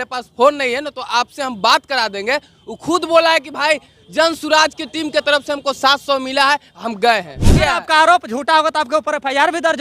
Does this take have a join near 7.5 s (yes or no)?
yes